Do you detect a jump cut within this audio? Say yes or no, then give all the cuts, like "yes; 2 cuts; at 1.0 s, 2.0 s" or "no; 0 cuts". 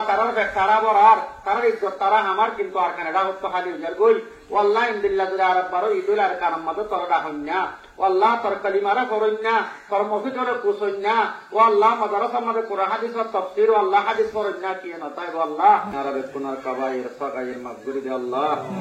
yes; 1 cut; at 15.9 s